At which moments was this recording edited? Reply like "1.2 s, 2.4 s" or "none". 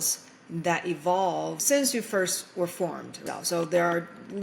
1.6 s, 3.2 s